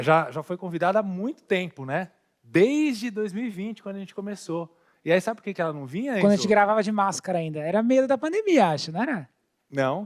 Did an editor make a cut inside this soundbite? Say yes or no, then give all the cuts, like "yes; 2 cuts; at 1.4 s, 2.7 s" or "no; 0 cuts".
no; 0 cuts